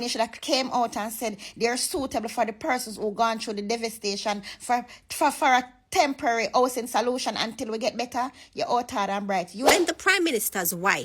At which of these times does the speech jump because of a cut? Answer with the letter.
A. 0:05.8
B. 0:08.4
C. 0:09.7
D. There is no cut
C